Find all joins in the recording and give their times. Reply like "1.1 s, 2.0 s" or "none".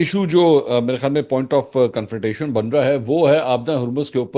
none